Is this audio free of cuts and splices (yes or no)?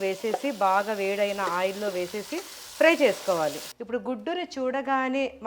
no